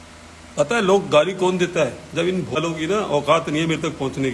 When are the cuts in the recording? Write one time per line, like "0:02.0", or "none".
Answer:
0:02.6